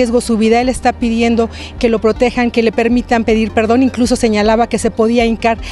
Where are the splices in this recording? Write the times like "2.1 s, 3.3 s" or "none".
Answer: none